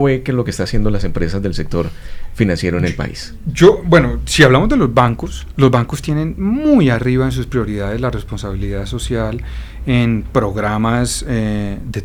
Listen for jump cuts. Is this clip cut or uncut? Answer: uncut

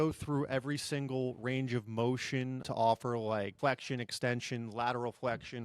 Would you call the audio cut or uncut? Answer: cut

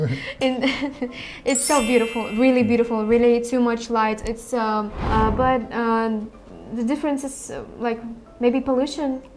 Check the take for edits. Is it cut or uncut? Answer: cut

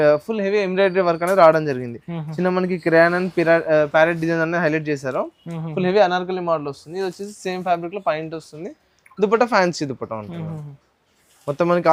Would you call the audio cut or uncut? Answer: uncut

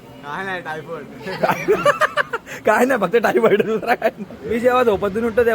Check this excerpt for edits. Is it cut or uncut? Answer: cut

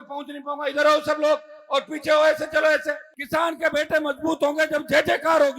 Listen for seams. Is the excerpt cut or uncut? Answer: cut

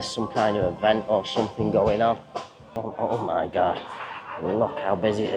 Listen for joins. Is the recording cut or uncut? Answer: cut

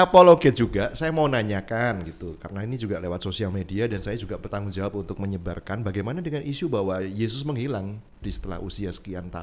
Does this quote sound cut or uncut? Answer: uncut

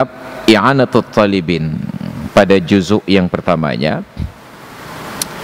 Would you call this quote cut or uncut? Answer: uncut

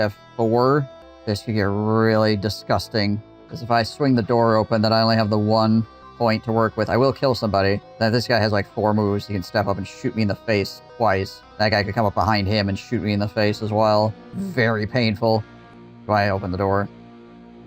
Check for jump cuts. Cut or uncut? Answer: uncut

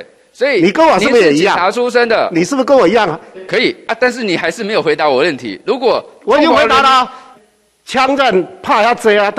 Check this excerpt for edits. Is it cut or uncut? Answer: cut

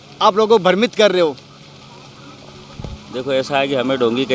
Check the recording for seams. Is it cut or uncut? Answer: uncut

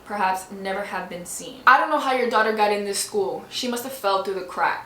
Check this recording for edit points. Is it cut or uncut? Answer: cut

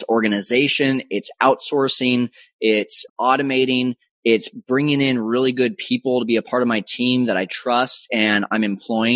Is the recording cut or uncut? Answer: cut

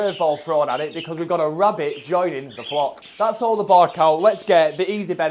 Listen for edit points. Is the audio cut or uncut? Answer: cut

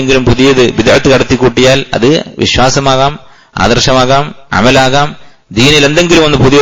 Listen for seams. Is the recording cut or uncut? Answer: uncut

